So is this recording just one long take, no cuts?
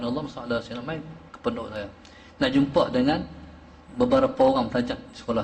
yes; 0 cuts

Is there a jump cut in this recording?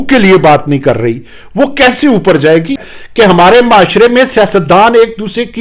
yes; 1 cut; at 2.9 s

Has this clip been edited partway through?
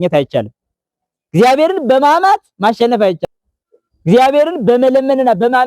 yes; 1 cut; at 3.2 s

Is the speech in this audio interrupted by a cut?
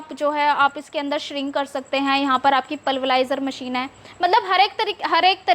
no; 0 cuts

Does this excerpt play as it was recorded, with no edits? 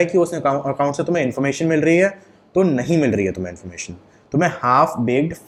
yes; 0 cuts

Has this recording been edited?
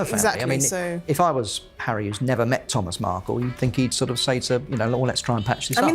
yes; 1 cut; at 3.5 s

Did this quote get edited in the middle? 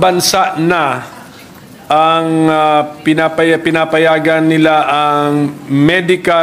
no; 0 cuts

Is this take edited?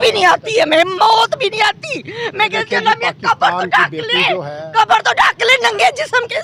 no; 0 cuts

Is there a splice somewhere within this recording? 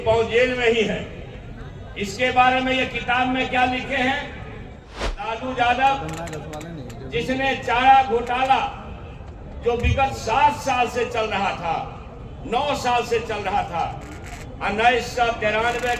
yes; 1 cut; at 4.8 s

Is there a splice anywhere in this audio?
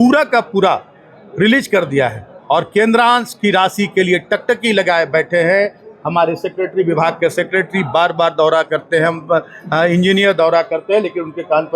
no; 0 cuts

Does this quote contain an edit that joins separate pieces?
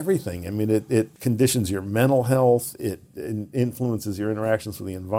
yes; 1 cut; at 1.1 s

